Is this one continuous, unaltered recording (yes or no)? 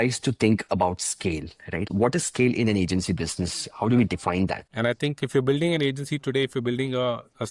no